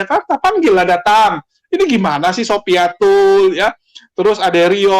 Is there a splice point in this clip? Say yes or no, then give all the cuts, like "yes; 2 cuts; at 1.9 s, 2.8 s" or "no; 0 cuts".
no; 0 cuts